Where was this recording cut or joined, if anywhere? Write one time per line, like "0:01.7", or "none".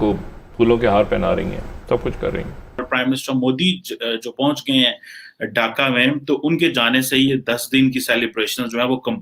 0:02.8